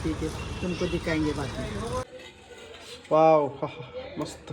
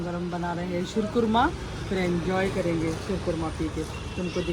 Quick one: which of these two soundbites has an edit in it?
first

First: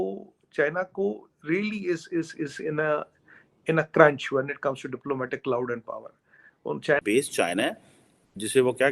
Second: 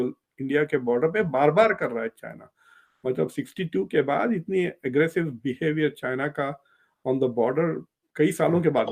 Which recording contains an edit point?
first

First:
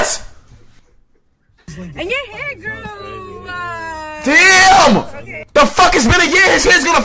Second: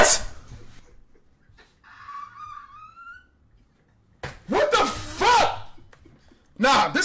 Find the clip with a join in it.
first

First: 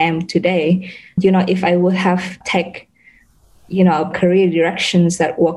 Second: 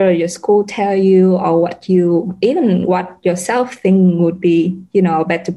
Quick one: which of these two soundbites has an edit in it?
first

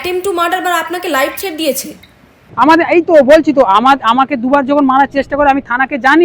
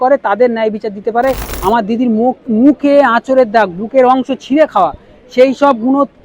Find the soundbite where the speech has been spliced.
second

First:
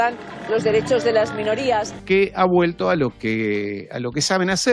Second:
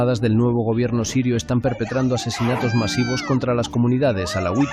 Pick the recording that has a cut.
first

